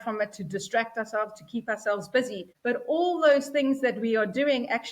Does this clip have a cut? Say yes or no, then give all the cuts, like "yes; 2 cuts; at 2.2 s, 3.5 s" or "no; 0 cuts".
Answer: yes; 1 cut; at 2.4 s